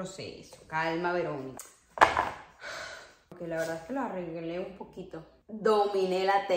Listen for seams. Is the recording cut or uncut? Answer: cut